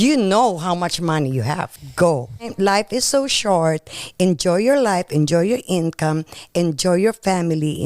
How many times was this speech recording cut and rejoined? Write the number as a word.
two